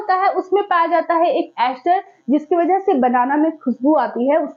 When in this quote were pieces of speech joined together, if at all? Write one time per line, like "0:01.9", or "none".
none